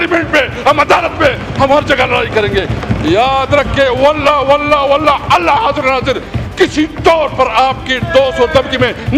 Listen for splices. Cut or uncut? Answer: uncut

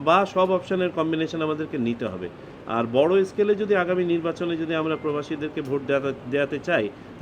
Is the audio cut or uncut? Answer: uncut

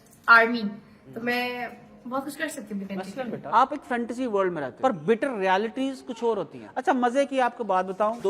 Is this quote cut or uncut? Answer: cut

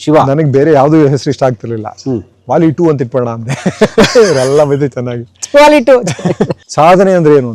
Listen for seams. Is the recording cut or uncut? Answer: cut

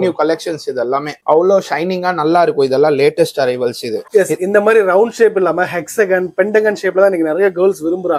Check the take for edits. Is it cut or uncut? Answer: uncut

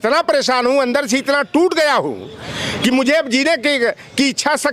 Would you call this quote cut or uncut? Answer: uncut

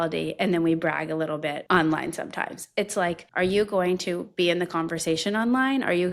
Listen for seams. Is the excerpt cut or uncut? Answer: cut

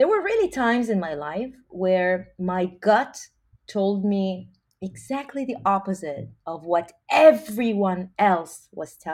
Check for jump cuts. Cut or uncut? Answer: uncut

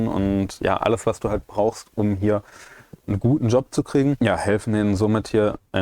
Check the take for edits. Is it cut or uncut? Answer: cut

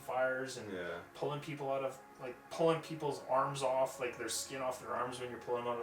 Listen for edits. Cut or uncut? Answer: uncut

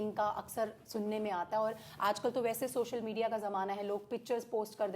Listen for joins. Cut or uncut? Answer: uncut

